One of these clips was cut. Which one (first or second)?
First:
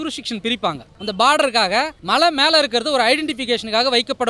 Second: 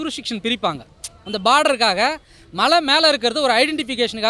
first